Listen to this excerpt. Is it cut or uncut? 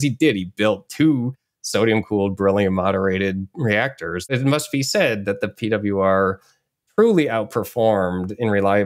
cut